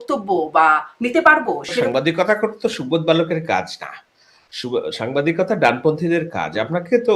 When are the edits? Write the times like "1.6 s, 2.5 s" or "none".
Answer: 1.9 s